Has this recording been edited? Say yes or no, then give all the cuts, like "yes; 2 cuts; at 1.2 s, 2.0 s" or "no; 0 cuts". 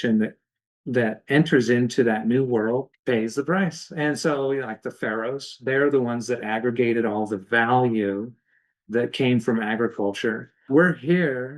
yes; 2 cuts; at 2.9 s, 10.7 s